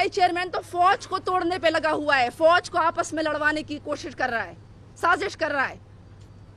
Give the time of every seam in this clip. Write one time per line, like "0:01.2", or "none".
none